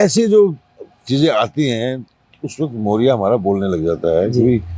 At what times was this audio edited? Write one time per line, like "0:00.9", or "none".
none